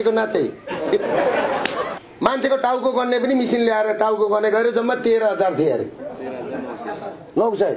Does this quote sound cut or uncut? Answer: cut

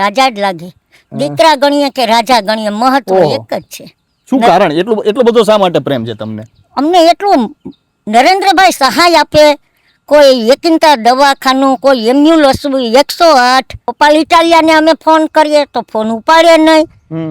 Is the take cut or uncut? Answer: cut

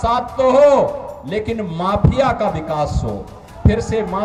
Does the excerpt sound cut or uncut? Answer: uncut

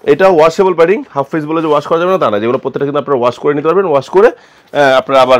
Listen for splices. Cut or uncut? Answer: uncut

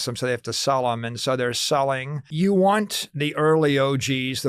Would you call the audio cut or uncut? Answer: cut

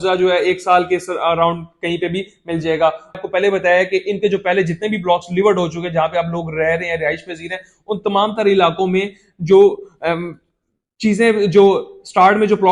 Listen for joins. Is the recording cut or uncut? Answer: cut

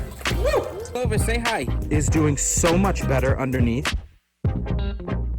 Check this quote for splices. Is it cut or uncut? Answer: uncut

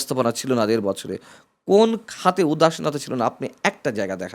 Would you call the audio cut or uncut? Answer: uncut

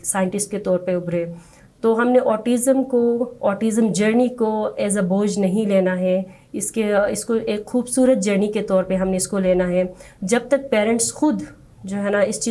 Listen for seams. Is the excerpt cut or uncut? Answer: uncut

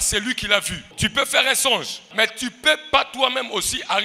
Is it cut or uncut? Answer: cut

